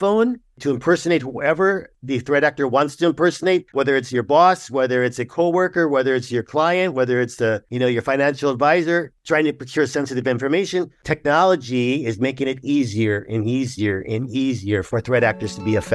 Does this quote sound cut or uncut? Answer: cut